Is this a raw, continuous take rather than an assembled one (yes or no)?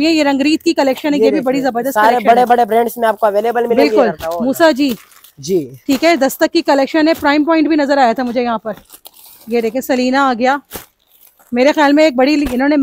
yes